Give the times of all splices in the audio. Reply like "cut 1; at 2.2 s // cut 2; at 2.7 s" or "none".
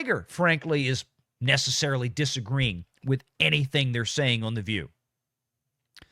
none